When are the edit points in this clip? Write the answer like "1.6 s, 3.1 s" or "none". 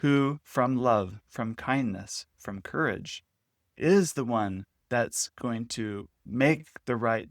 6.2 s